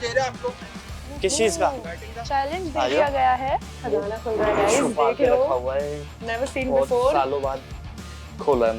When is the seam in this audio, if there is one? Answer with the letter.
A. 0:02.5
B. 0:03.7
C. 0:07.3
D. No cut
B